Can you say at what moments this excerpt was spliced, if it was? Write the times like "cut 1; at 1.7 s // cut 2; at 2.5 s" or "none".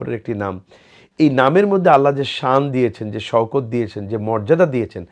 none